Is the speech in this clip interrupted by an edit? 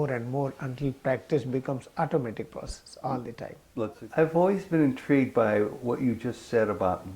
yes; 1 cut; at 4.0 s

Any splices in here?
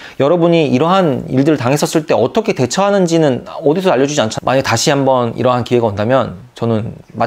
yes; 1 cut; at 4.3 s

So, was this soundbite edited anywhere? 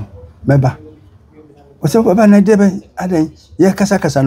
no; 0 cuts

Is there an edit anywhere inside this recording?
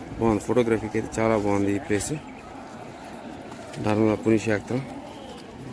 no; 0 cuts

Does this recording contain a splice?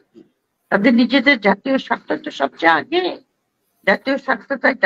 no; 0 cuts

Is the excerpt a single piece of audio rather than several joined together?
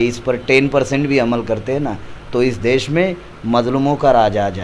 yes; 0 cuts

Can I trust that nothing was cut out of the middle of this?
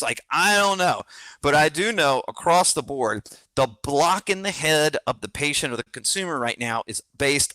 no; 1 cut; at 1.2 s

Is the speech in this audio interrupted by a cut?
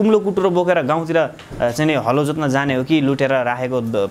no; 0 cuts

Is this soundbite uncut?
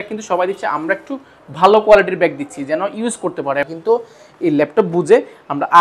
no; 1 cut; at 3.7 s

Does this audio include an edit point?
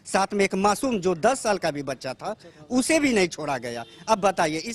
no; 0 cuts

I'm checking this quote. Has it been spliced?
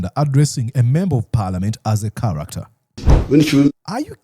yes; 1 cut; at 3.1 s

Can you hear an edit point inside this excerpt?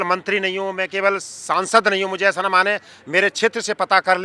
no; 0 cuts

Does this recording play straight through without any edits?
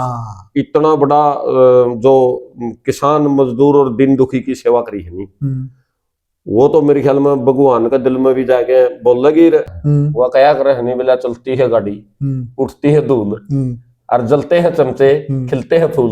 no; 1 cut; at 9.8 s

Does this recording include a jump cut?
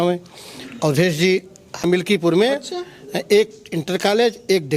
yes; 1 cut; at 1.9 s

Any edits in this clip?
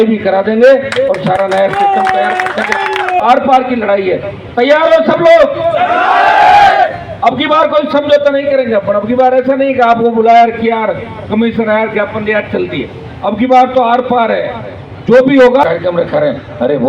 yes; 2 cuts; at 3.2 s, 15.6 s

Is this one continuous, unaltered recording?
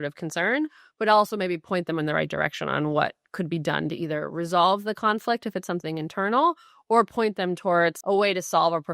no; 1 cut; at 8.0 s

